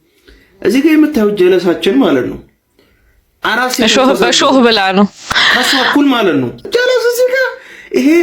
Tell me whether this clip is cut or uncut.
cut